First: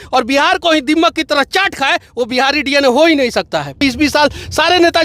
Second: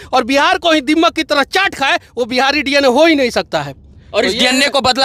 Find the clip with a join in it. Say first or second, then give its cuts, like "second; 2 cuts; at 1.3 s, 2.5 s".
first; 1 cut; at 3.8 s